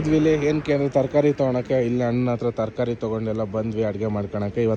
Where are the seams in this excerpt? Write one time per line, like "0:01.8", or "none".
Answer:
none